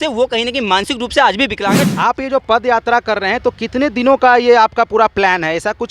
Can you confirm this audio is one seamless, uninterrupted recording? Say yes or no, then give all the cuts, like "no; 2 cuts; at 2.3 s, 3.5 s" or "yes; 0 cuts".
no; 1 cut; at 1.8 s